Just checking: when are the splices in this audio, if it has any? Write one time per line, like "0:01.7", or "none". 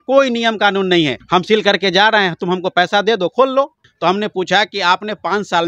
0:01.2
0:03.8